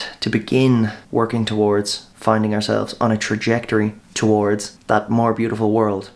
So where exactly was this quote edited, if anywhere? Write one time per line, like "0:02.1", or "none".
0:01.0
0:02.0
0:04.0
0:04.7